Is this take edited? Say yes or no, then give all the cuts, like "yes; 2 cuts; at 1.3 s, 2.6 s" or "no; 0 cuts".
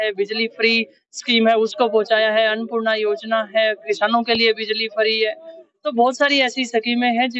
no; 0 cuts